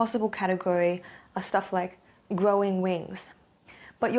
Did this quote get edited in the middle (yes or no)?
no